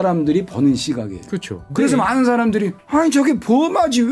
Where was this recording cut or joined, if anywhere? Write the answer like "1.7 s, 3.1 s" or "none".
1.7 s, 2.8 s

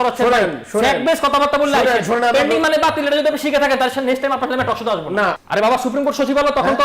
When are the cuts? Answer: 5.4 s

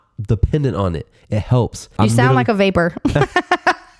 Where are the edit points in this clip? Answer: 1.9 s

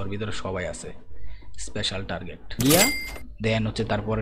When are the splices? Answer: 2.6 s

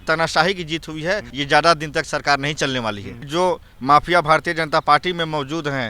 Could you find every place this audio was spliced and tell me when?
1.3 s, 3.2 s

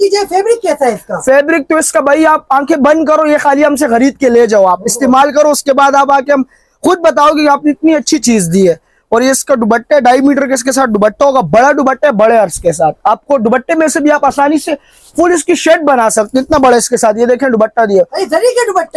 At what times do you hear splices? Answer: none

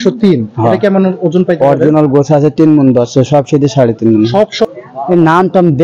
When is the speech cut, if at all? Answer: 4.7 s

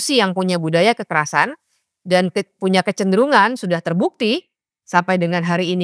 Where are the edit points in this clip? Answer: none

